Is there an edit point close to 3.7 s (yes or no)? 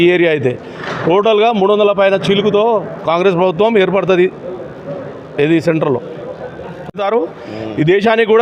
no